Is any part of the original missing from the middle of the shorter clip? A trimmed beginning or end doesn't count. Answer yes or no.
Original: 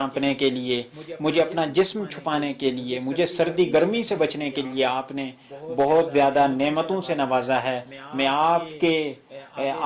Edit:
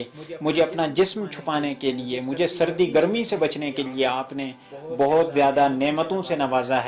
no